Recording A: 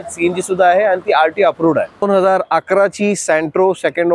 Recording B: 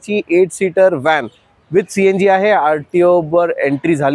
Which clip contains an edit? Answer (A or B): A